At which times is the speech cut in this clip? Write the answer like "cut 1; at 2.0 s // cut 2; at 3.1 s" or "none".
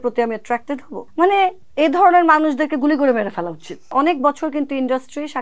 cut 1; at 1.0 s // cut 2; at 1.6 s // cut 3; at 3.9 s